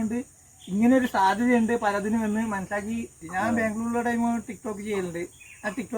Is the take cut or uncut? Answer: cut